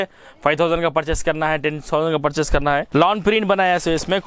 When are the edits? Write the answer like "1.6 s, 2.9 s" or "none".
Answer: 2.9 s

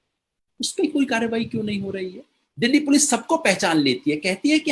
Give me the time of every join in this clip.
none

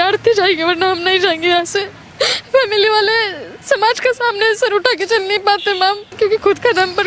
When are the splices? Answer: 2.0 s, 6.1 s

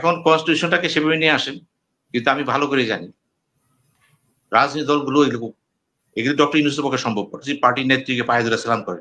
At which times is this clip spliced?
7.4 s

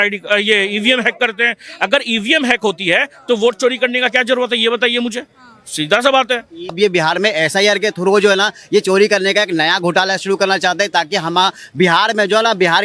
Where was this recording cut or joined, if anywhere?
6.7 s

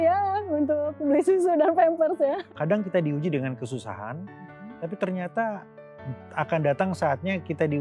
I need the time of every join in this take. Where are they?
2.4 s

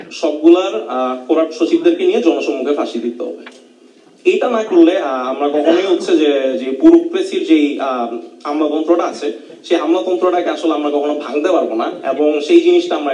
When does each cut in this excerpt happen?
none

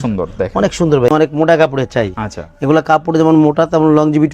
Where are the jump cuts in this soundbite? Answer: 1.1 s

